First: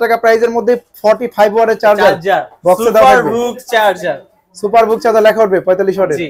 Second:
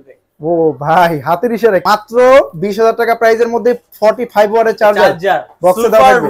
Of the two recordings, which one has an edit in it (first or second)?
second